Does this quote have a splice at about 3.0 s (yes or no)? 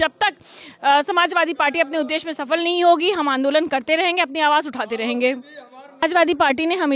no